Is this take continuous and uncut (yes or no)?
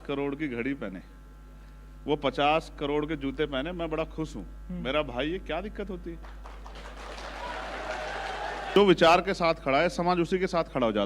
no